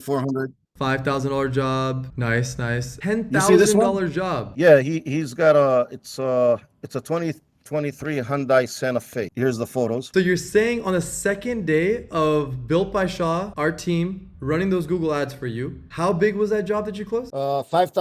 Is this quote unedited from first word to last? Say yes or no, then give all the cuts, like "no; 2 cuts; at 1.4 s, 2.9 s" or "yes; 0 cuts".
no; 2 cuts; at 2.9 s, 10.0 s